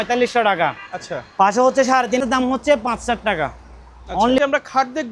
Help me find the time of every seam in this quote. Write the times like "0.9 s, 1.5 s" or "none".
2.2 s, 4.4 s